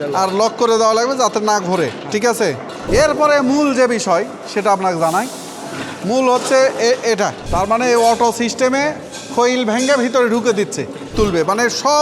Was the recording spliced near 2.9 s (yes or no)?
yes